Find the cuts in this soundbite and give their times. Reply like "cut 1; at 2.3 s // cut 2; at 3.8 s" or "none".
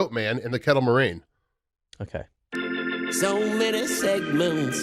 cut 1; at 2.7 s